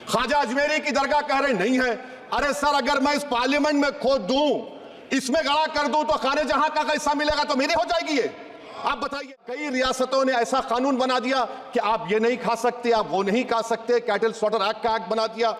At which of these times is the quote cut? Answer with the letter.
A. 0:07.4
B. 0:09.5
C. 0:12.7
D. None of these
B